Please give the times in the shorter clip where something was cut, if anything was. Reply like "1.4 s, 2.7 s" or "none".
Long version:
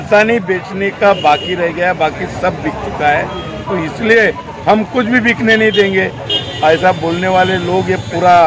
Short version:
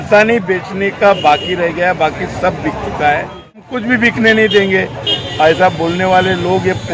3.7 s